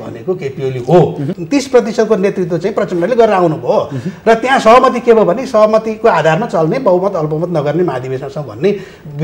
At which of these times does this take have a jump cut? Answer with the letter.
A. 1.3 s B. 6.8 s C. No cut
A